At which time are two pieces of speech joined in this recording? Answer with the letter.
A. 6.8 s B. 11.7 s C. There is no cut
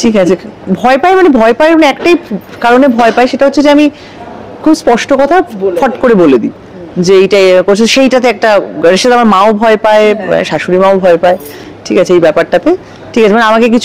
C